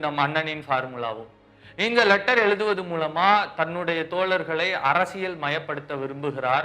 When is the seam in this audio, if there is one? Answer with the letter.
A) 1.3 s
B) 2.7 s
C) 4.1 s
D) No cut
D